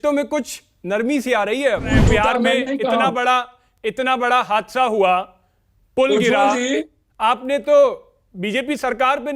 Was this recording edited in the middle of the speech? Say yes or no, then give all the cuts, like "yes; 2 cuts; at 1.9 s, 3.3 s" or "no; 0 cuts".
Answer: yes; 1 cut; at 1.9 s